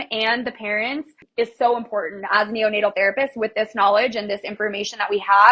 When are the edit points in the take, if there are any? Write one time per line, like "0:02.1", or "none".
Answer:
0:01.2